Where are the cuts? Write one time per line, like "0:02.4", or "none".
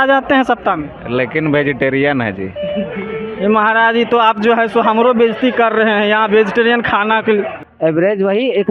0:07.6

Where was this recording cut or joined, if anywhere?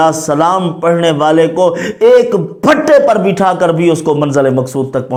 none

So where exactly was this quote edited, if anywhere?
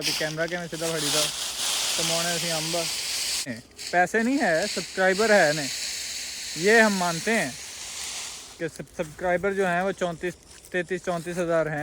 0:03.6

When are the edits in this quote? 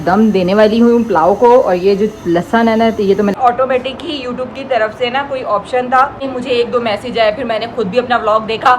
0:03.4
0:06.3

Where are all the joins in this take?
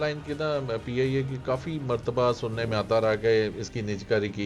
none

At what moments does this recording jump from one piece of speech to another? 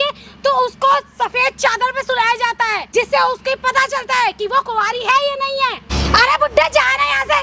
0:02.8
0:05.9

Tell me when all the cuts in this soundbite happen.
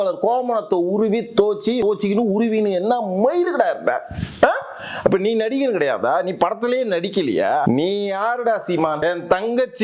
0:01.8
0:07.6
0:09.0

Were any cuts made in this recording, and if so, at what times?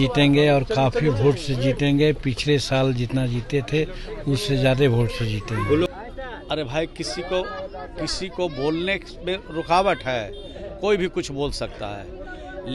0:05.9

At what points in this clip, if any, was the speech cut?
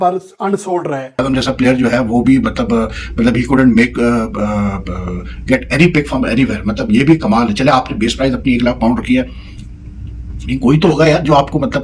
0:01.2

